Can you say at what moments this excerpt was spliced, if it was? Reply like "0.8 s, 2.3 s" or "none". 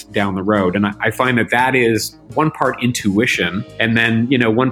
2.2 s, 3.6 s